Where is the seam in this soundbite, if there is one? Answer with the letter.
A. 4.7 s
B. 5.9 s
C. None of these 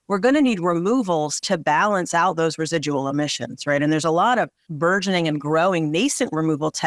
A